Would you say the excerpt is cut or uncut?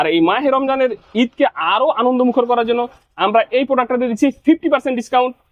uncut